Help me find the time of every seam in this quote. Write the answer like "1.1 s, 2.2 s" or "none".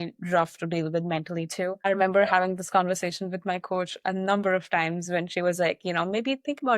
1.8 s